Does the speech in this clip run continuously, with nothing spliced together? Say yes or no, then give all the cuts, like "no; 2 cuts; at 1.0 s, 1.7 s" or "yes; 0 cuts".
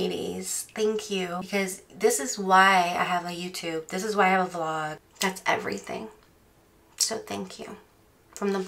no; 1 cut; at 5.0 s